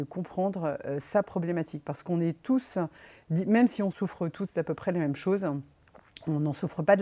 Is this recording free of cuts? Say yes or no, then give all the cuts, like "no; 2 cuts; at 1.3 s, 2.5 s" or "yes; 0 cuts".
yes; 0 cuts